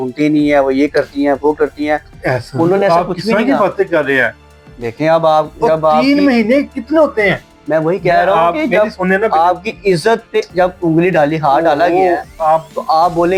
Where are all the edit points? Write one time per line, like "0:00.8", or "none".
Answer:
none

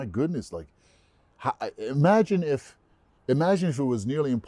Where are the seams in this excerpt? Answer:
none

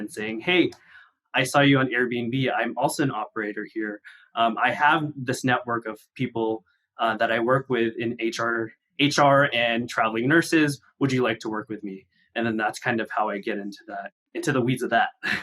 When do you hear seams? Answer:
0:08.7
0:14.2

